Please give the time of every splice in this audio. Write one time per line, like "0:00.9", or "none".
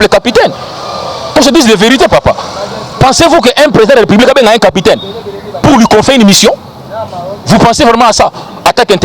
none